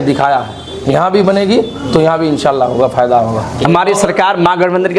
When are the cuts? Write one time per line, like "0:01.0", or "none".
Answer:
0:03.7